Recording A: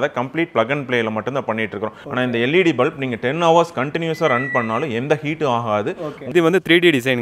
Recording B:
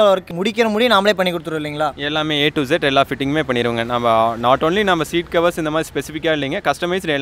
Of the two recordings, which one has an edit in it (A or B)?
A